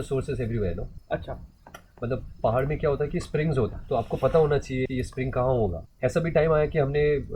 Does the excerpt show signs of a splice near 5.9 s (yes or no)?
yes